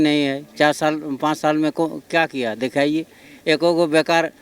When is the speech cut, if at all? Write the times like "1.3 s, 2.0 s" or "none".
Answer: none